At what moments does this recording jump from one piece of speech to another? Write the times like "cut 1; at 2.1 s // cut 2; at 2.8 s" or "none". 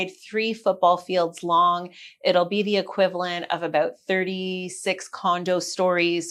none